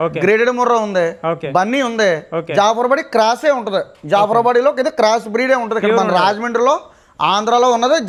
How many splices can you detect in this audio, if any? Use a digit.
0